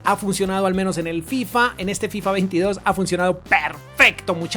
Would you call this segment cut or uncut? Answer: uncut